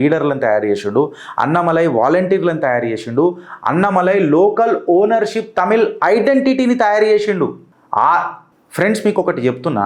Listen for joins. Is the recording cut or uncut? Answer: uncut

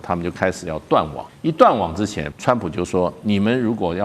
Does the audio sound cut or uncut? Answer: cut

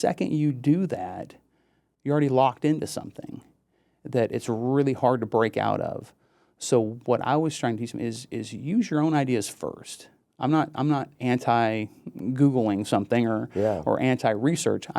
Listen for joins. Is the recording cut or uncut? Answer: uncut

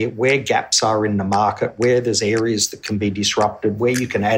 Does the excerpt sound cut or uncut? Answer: uncut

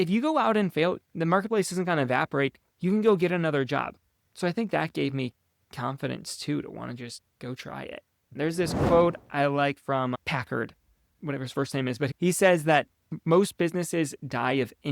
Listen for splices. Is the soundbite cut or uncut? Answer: cut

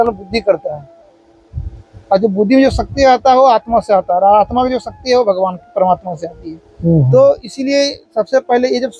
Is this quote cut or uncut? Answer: uncut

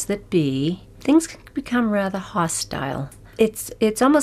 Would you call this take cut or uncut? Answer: cut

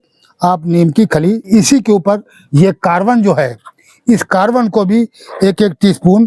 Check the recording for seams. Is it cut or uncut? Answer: cut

